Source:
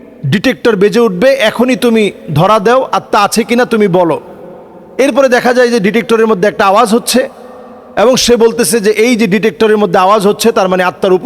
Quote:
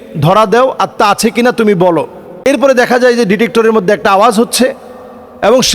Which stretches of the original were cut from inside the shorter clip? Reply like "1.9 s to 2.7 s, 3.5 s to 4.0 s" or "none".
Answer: 4.4 s to 4.8 s